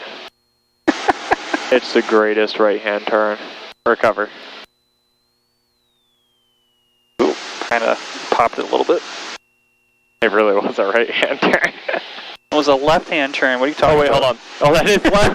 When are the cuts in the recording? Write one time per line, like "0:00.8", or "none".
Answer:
0:03.6